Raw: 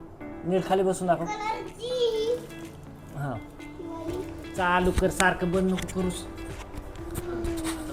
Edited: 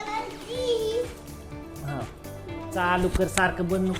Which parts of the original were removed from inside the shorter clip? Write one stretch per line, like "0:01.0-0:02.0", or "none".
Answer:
0:04.1-0:04.6